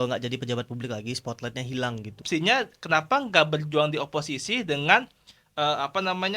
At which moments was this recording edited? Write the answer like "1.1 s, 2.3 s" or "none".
2.2 s